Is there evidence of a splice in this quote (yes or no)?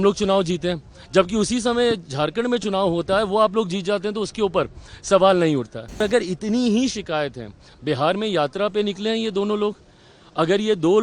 yes